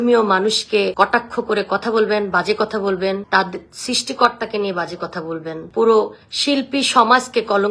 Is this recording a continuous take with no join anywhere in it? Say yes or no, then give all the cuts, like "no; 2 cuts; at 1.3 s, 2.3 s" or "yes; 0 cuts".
no; 1 cut; at 0.9 s